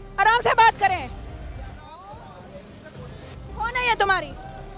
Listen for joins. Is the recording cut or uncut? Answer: uncut